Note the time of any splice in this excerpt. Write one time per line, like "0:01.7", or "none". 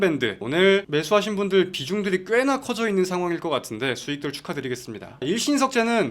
0:05.2